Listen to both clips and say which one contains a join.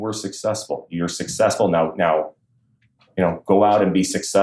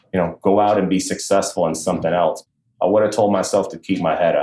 second; 1 cut; at 2.4 s

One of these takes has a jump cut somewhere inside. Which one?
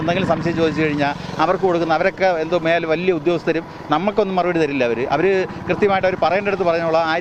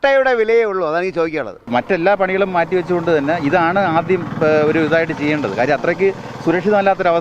second; 1 cut; at 1.6 s

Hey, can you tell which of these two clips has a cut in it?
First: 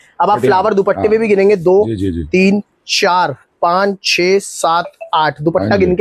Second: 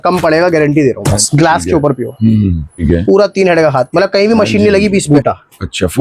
second; 3 cuts; at 1.1 s, 2.8 s, 5.1 s

